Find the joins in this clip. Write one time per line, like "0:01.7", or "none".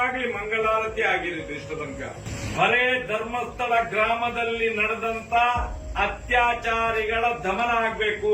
0:02.2